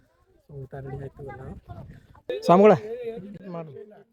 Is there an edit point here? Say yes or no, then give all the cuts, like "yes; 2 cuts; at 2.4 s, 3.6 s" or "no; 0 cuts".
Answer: yes; 1 cut; at 2.2 s